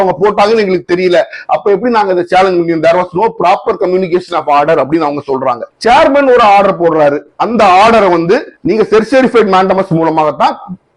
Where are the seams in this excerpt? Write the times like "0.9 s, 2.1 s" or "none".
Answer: 5.7 s